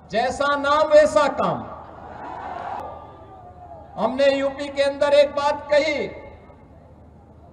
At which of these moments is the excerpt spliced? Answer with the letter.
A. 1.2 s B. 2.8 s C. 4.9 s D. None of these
B